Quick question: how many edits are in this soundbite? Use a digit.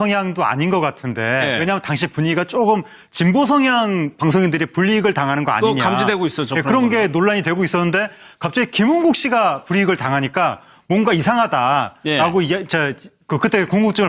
1